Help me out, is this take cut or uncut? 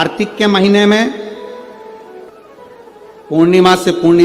cut